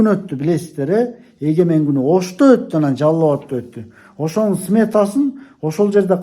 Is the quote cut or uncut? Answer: uncut